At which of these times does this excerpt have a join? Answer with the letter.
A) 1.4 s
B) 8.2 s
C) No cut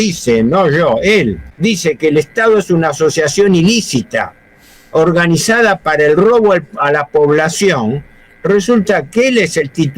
A